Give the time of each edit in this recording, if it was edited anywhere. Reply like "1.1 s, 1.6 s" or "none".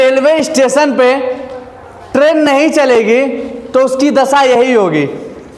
none